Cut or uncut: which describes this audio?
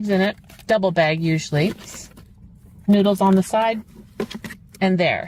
uncut